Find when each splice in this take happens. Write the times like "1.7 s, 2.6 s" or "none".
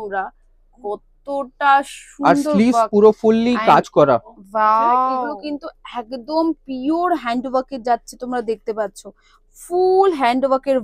5.3 s

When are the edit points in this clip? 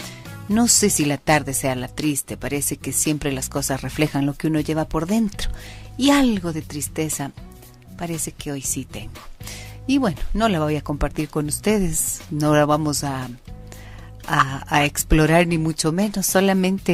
none

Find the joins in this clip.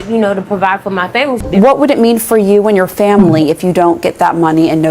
1.4 s

